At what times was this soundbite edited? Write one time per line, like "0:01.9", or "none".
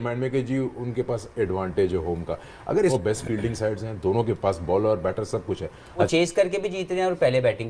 0:02.9
0:06.1